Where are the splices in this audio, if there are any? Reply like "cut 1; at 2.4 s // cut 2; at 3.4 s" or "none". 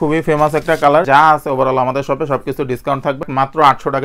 cut 1; at 1.1 s // cut 2; at 3.2 s